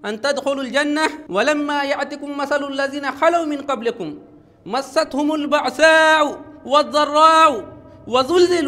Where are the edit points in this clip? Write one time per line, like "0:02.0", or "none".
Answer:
0:01.2